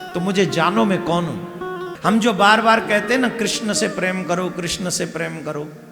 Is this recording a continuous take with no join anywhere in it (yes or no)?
no